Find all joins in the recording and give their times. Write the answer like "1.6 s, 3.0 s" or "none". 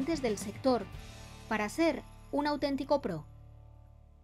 3.2 s

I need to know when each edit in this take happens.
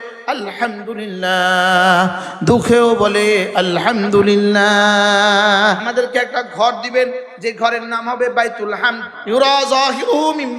5.8 s, 9.1 s

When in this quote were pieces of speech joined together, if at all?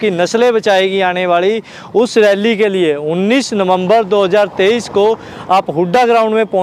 none

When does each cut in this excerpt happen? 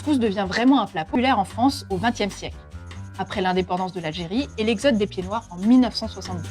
1.1 s

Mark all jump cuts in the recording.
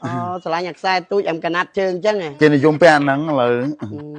2.3 s

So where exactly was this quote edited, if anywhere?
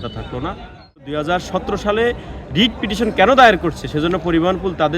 1.0 s

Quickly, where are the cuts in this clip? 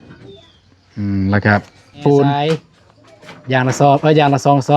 2.4 s

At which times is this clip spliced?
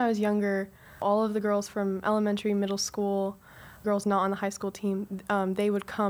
1.0 s, 3.8 s

